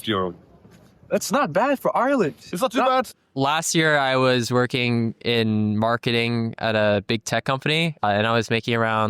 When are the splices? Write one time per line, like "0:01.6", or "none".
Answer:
0:03.1
0:07.9